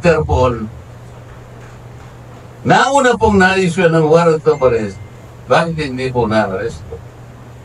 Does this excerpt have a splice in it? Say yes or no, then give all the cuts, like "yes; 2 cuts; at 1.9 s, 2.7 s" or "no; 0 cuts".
no; 0 cuts